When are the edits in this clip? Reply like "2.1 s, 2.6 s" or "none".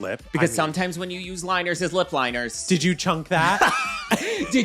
2.6 s